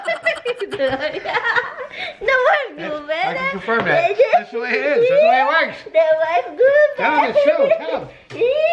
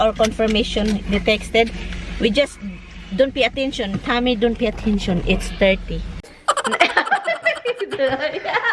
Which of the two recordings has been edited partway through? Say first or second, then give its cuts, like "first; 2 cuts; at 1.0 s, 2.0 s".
second; 1 cut; at 6.3 s